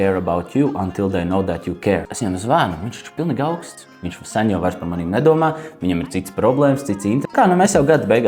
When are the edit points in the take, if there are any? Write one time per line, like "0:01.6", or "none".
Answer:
0:02.1
0:07.3